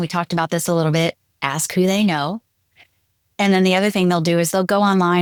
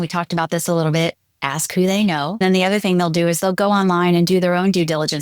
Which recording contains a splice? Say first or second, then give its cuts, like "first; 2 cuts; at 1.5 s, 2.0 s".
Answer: second; 1 cut; at 2.4 s